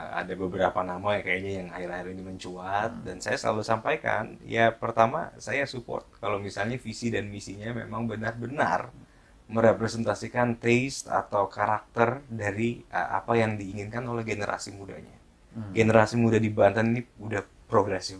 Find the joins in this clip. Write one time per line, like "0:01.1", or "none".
none